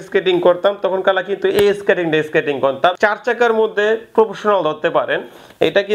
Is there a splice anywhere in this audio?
yes; 1 cut; at 3.0 s

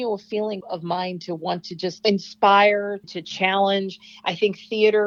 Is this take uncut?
yes; 0 cuts

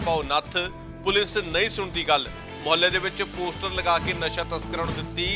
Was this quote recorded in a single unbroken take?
yes; 0 cuts

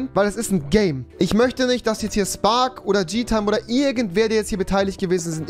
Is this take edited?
yes; 1 cut; at 1.1 s

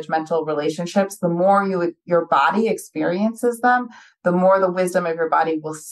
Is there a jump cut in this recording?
no; 0 cuts

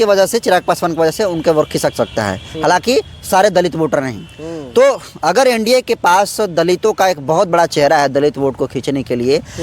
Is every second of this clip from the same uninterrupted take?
yes; 0 cuts

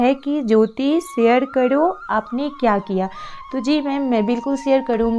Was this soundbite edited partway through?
no; 0 cuts

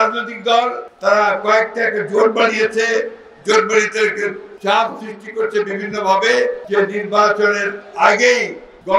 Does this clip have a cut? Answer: no; 0 cuts

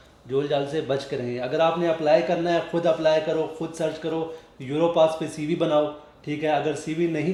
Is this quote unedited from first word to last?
yes; 0 cuts

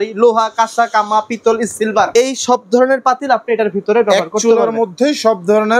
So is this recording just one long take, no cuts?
yes; 0 cuts

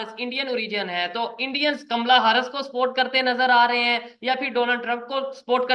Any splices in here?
no; 0 cuts

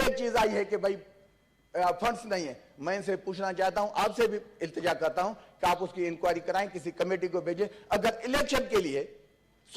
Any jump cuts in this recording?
no; 0 cuts

